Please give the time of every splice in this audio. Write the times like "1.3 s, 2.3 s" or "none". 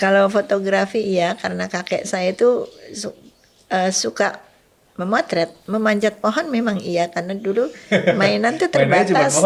5.6 s